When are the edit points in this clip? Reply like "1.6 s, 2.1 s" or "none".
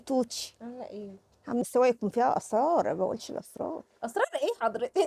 1.6 s